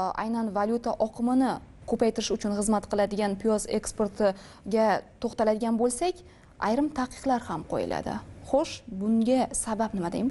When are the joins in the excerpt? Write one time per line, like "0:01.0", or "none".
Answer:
none